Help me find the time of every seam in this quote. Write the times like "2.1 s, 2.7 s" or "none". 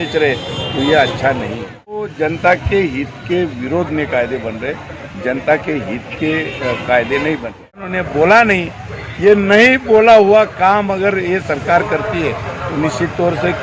2.1 s, 7.9 s